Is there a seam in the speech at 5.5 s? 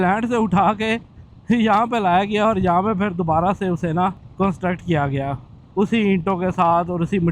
no; 1 cut; at 4.2 s

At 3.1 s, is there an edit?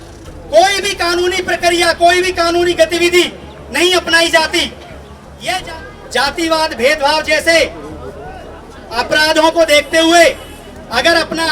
no; 1 cut; at 5.6 s

